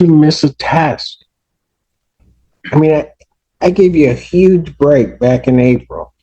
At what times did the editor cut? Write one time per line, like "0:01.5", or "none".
none